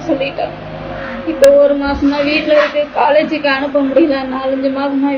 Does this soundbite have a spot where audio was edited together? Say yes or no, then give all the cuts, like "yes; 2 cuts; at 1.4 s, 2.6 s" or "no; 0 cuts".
no; 0 cuts